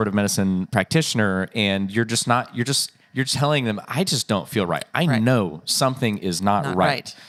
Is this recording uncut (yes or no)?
yes